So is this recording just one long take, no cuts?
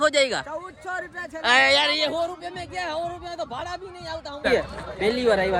no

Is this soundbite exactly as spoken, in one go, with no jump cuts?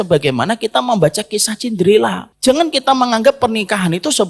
no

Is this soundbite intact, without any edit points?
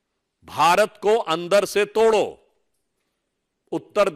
yes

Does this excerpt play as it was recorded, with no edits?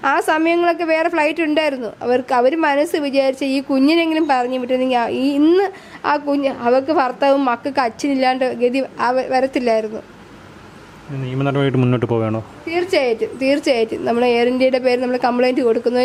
yes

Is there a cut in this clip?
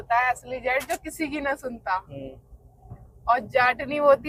no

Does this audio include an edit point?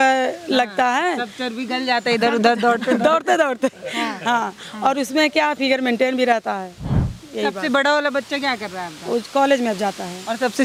no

